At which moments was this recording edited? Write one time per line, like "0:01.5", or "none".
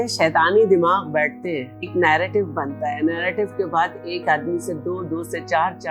0:01.9